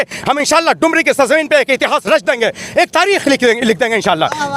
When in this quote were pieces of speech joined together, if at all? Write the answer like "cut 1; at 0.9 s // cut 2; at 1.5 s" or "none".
none